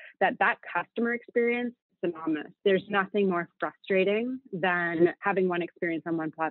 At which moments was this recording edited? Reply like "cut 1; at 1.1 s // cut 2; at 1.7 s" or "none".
cut 1; at 2.6 s // cut 2; at 5.2 s